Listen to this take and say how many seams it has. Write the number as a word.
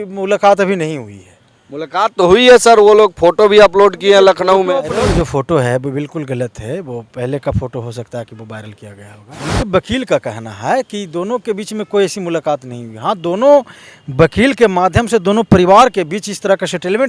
two